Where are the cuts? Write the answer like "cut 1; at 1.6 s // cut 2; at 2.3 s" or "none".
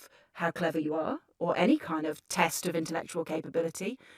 cut 1; at 2.6 s